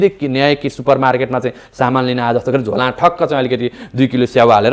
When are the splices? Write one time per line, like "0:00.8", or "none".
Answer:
none